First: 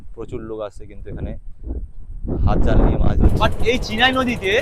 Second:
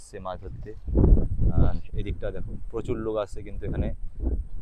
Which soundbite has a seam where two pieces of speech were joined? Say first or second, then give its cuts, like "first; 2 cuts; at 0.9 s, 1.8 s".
first; 1 cut; at 3.4 s